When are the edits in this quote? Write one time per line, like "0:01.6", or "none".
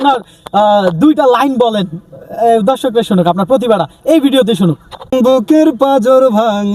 0:05.1